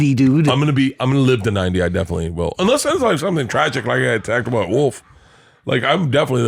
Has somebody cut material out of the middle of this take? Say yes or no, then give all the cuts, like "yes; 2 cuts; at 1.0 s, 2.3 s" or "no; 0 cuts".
no; 0 cuts